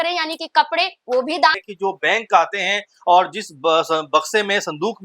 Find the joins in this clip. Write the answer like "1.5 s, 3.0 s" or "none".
1.7 s